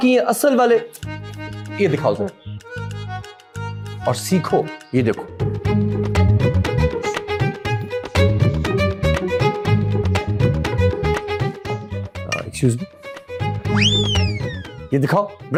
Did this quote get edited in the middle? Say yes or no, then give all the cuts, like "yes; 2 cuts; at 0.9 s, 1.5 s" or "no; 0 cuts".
no; 0 cuts